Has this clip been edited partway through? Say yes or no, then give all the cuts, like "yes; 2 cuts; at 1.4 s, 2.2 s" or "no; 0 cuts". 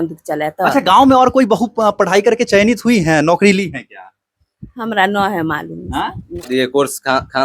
yes; 1 cut; at 6.5 s